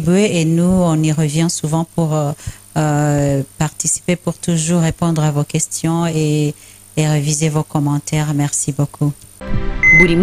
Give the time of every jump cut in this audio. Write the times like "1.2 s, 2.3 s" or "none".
9.3 s